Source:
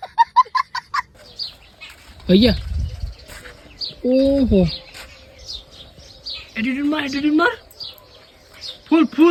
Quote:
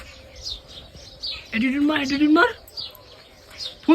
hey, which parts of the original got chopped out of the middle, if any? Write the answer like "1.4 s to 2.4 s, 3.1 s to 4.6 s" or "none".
none